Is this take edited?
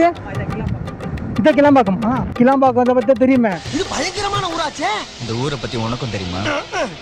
no; 0 cuts

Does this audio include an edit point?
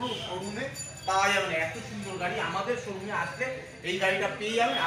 no; 0 cuts

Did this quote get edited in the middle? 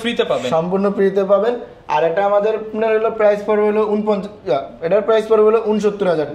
no; 0 cuts

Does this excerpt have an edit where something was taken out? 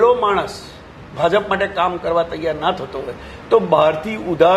no; 0 cuts

